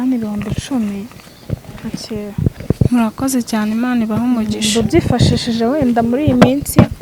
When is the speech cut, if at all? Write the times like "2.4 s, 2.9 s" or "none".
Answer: none